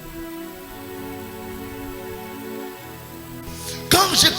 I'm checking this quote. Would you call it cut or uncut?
cut